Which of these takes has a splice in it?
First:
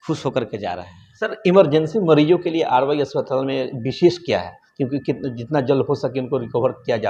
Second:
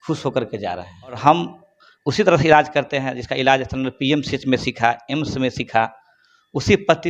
second; 1 cut; at 1.2 s

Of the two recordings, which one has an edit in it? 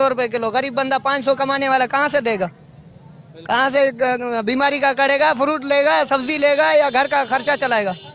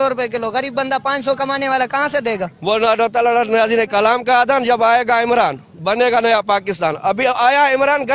second; 1 cut; at 2.5 s

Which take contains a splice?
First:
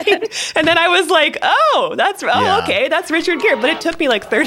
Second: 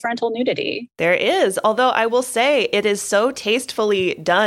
second; 1 cut; at 3.4 s

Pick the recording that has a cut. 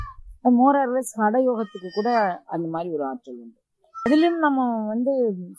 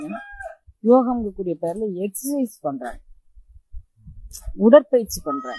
first; 1 cut; at 4.1 s

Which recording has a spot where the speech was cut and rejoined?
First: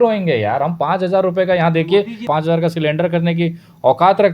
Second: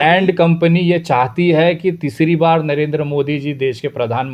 first; 1 cut; at 2.3 s

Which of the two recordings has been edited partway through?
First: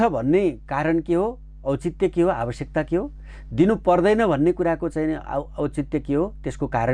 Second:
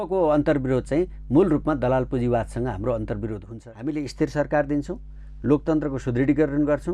second; 1 cut; at 3.5 s

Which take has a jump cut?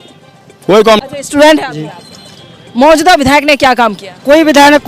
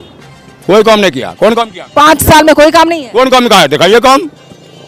first; 1 cut; at 1.0 s

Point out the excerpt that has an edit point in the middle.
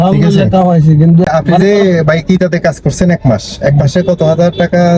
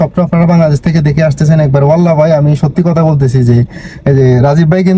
first; 1 cut; at 1.2 s

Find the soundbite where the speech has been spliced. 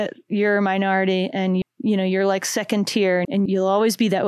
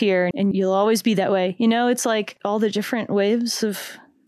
second; 1 cut; at 2.3 s

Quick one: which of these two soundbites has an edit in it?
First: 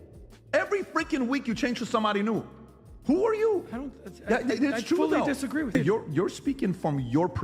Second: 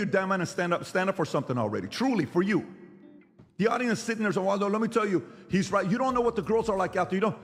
first; 1 cut; at 5.7 s

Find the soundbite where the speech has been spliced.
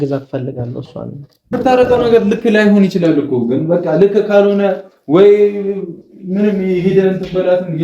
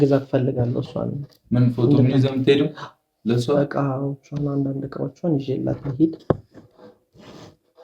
first; 1 cut; at 1.5 s

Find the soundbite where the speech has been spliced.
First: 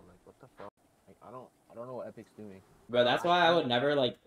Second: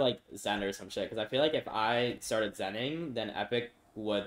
first; 1 cut; at 2.8 s

